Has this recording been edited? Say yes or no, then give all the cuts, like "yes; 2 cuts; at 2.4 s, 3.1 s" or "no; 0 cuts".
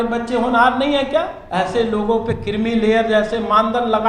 yes; 1 cut; at 1.4 s